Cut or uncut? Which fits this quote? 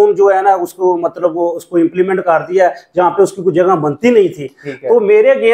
uncut